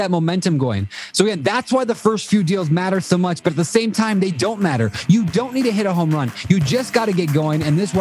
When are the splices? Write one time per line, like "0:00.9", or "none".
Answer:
none

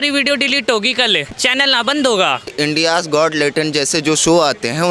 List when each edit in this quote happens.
0:01.3
0:02.5

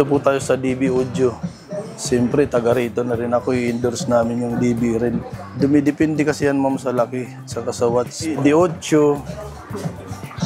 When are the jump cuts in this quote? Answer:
0:08.2

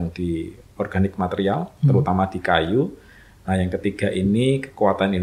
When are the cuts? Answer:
none

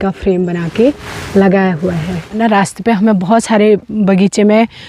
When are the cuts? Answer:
0:02.4

